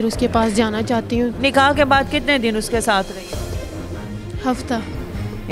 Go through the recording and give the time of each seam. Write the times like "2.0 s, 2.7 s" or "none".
1.3 s

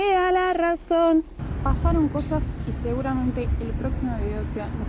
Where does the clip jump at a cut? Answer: 1.4 s

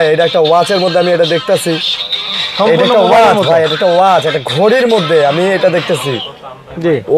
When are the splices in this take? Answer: none

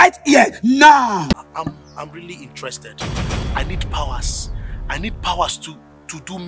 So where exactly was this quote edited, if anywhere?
1.3 s

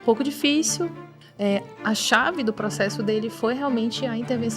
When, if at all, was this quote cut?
0.9 s

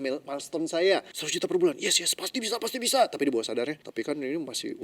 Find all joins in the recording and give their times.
1.2 s, 3.8 s

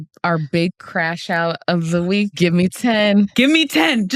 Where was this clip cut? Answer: 1.6 s, 2.8 s

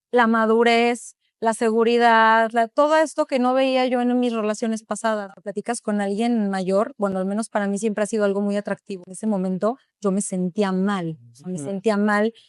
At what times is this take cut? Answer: 5.4 s, 9.0 s

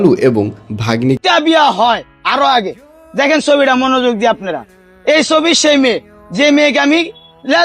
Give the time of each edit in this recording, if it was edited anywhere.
1.2 s

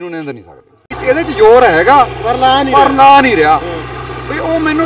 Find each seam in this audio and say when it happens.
0.9 s

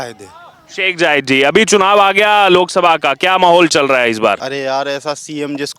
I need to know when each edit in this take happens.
4.4 s

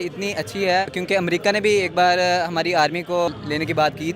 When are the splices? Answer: 1.0 s, 3.3 s

